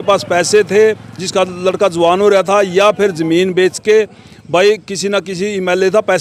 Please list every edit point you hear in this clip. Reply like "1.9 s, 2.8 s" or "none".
none

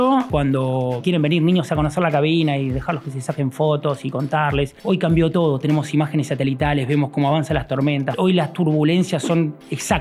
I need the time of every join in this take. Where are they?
0.9 s, 4.8 s, 8.1 s

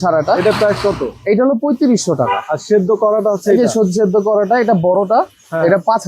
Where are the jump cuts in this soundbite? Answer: none

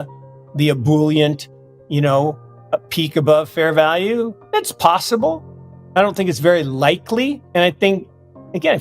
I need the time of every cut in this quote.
4.4 s, 7.4 s

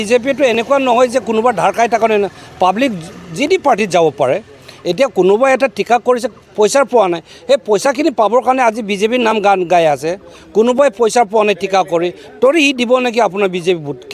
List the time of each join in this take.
none

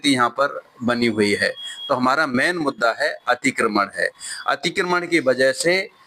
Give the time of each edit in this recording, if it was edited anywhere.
none

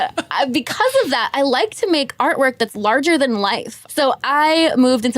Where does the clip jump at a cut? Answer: 3.8 s

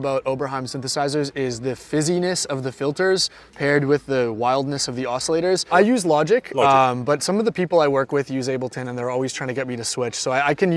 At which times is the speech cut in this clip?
5.7 s

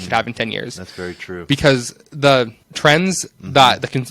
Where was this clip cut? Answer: 2.6 s

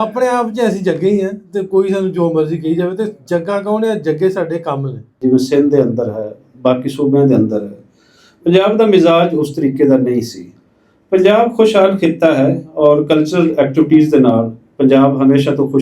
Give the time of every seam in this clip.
5.1 s

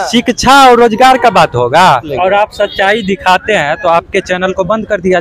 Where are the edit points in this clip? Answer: 2.1 s

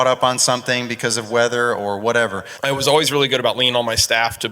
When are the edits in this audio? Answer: 2.5 s

